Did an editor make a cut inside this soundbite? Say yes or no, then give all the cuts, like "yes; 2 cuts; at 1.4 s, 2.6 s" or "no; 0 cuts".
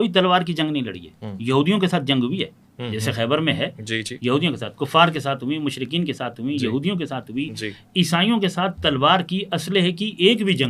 no; 0 cuts